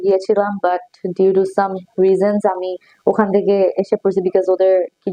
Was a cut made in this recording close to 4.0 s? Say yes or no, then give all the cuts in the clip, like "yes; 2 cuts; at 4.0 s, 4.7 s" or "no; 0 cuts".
no; 0 cuts